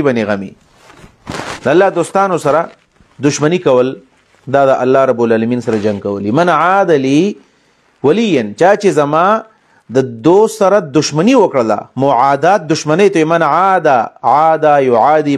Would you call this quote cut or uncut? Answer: uncut